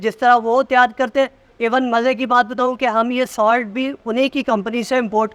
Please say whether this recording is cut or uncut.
uncut